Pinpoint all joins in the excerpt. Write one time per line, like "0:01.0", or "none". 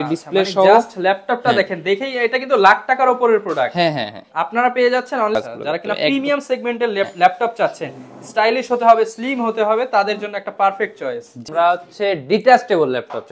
0:05.4
0:11.4